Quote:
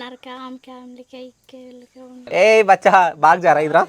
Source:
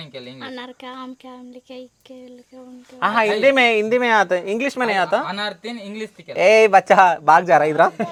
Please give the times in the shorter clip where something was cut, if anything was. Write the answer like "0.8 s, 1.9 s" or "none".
2.2 s